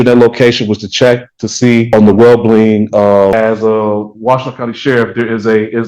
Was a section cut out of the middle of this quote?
yes; 2 cuts; at 1.9 s, 3.3 s

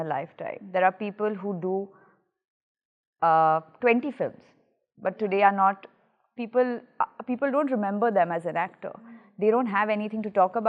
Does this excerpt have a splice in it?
no; 0 cuts

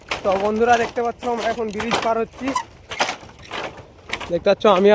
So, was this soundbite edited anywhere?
no; 0 cuts

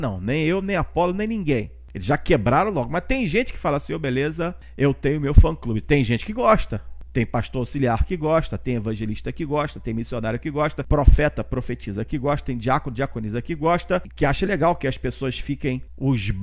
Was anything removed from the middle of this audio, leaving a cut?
no; 0 cuts

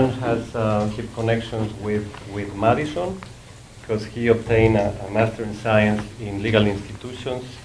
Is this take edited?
no; 0 cuts

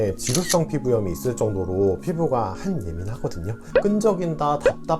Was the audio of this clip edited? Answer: yes; 1 cut; at 3.6 s

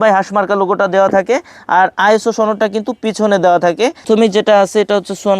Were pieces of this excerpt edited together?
yes; 1 cut; at 4.0 s

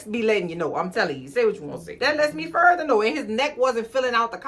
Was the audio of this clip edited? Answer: yes; 1 cut; at 1.8 s

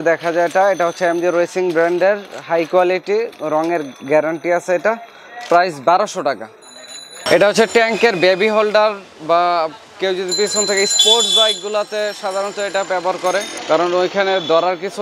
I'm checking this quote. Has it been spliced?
no; 0 cuts

